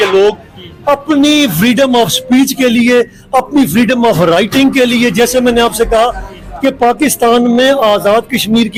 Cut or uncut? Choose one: uncut